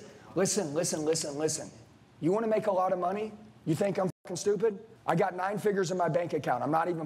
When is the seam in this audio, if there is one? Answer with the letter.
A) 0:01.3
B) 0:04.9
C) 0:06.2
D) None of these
D